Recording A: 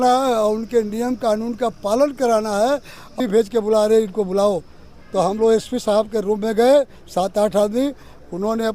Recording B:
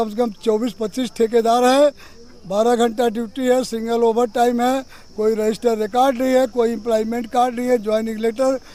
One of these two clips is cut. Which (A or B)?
A